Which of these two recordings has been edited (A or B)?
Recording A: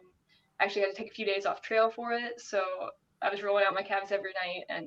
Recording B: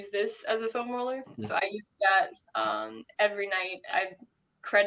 B